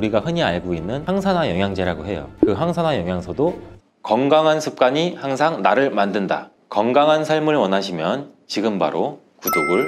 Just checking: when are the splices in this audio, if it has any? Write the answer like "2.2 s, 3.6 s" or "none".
3.8 s